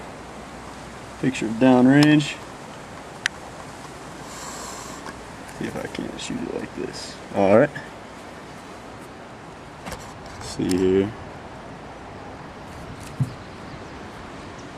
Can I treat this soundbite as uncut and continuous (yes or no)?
yes